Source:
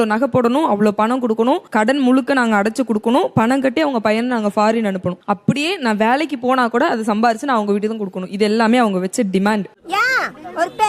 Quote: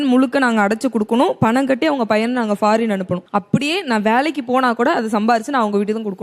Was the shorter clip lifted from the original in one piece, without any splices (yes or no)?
yes